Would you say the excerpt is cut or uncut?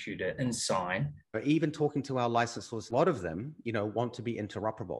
cut